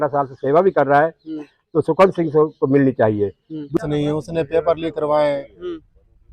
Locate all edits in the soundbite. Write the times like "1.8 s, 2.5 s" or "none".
3.7 s

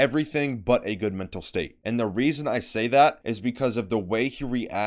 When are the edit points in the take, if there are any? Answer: 3.3 s

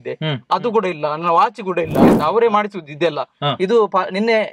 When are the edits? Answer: 2.2 s

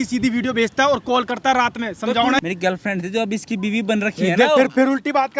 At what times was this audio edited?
2.4 s

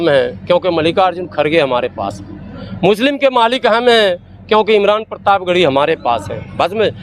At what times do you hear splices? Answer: none

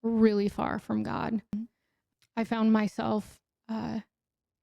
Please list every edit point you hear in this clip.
1.5 s

